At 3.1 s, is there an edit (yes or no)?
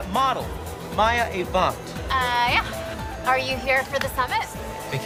no